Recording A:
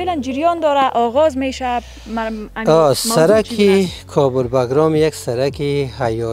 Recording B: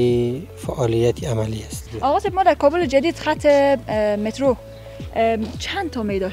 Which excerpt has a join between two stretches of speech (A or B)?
B